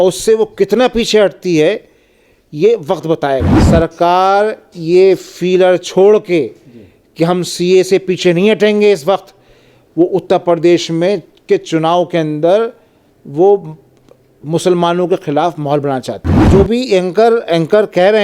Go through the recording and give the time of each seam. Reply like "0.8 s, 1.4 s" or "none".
3.5 s, 16.4 s

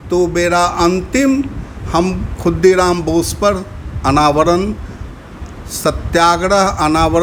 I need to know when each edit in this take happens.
none

